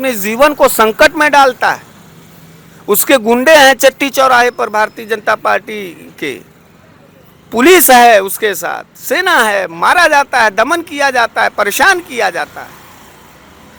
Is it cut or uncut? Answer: uncut